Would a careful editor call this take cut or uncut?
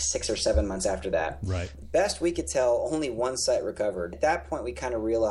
cut